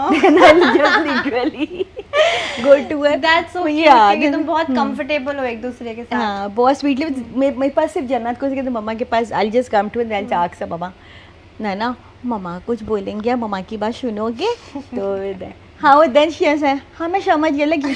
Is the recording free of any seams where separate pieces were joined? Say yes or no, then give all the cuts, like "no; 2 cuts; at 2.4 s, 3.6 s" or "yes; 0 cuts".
yes; 0 cuts